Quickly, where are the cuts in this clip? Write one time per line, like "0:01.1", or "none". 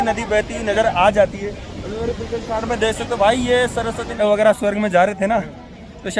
0:04.2